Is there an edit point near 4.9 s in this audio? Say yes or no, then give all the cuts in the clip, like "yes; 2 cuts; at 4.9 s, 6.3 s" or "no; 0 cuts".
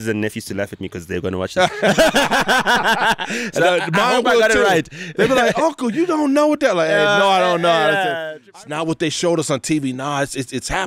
no; 1 cut; at 8.3 s